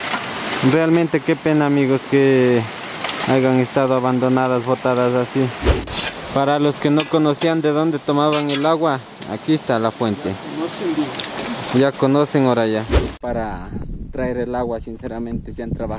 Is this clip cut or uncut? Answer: cut